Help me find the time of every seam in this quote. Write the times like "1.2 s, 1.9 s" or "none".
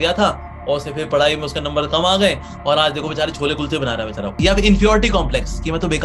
2.5 s, 4.4 s

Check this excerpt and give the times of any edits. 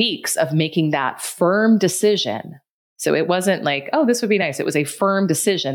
none

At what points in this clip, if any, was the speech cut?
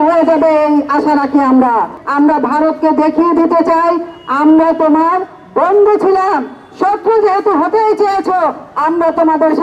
2.0 s

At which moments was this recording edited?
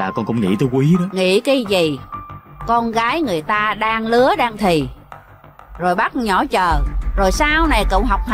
1.1 s

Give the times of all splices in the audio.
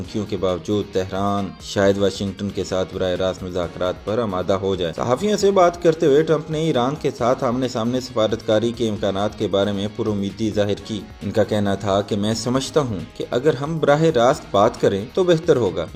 none

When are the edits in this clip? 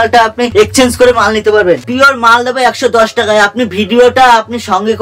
1.9 s

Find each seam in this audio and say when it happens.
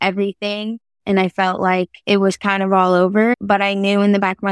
2.0 s, 3.3 s

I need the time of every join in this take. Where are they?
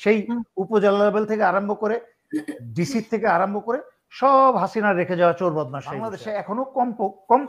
6.2 s

